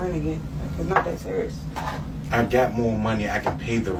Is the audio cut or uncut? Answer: uncut